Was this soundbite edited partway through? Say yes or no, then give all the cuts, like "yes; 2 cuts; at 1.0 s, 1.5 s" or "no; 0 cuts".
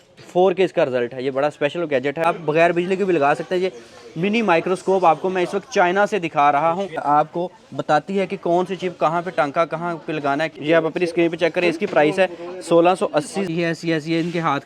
yes; 4 cuts; at 2.2 s, 7.0 s, 10.5 s, 13.5 s